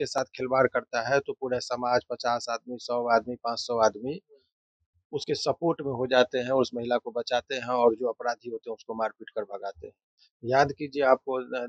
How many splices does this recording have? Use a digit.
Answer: 0